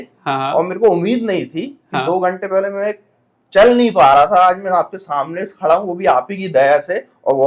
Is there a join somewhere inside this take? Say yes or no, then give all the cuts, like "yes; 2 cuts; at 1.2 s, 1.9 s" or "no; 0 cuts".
no; 0 cuts